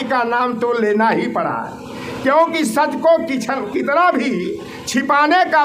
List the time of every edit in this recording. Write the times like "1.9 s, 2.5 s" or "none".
none